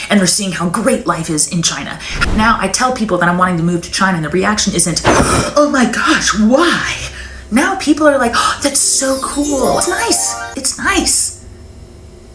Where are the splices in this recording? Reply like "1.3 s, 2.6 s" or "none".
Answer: 2.1 s, 9.8 s